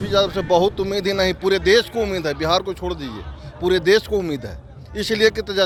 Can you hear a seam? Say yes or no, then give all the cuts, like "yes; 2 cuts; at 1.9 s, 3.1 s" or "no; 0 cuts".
no; 0 cuts